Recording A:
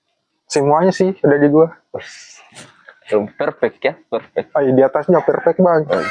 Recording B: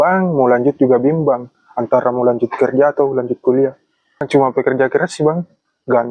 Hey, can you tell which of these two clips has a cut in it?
B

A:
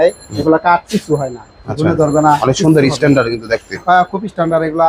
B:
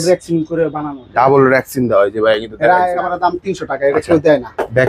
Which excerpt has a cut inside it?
B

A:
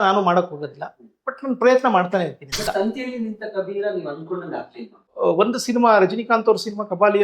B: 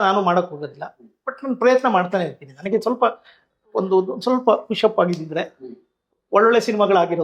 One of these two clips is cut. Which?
A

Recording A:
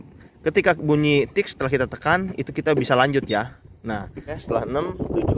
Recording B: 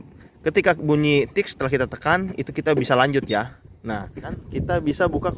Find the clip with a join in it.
B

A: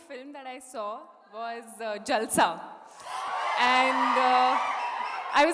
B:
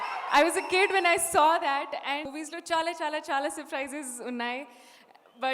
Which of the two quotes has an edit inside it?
B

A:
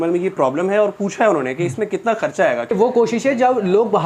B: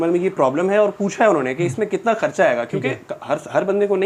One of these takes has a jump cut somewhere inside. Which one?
A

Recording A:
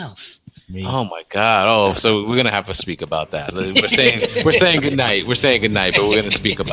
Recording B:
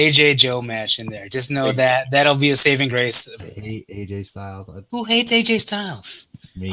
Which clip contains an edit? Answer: B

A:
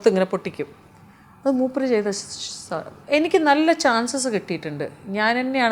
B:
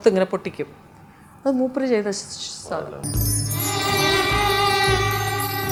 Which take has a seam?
A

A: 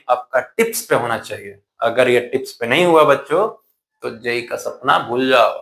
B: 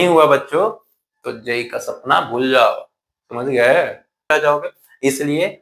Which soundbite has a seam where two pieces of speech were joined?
B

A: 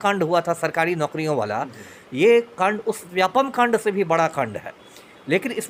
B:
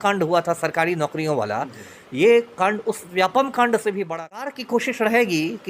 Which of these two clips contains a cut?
B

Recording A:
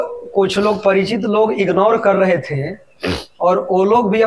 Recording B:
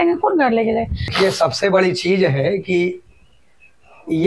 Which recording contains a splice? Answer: B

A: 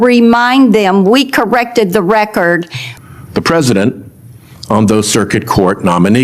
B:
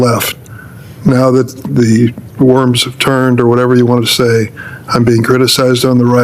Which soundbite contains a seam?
A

